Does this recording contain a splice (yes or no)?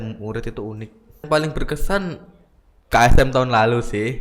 yes